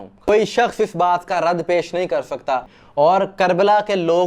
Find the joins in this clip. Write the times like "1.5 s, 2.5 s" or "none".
2.7 s